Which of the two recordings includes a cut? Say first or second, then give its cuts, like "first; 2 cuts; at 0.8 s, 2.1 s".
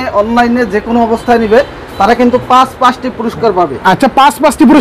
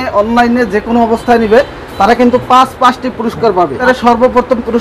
second; 1 cut; at 3.8 s